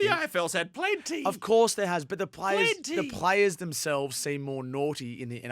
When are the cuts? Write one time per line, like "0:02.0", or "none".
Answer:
none

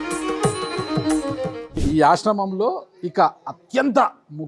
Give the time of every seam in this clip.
0:01.5

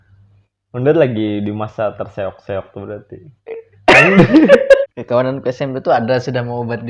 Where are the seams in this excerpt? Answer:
0:04.8

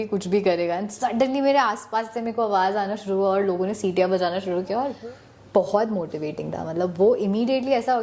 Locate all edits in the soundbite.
0:04.9

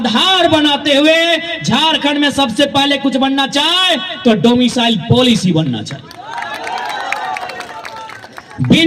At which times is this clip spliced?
none

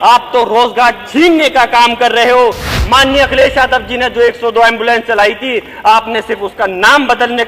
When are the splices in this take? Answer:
0:02.7

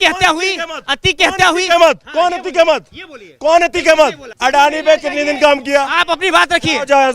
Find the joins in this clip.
0:04.3

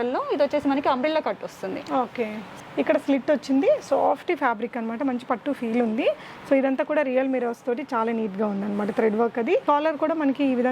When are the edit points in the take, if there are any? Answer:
0:02.5
0:09.6

